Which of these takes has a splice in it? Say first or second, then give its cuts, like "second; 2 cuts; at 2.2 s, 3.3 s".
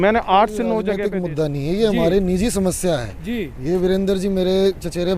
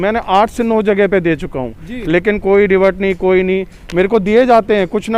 first; 1 cut; at 0.9 s